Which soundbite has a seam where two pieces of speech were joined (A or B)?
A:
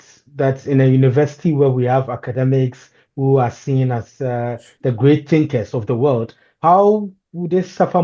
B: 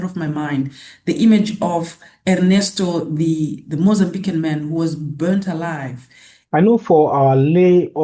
B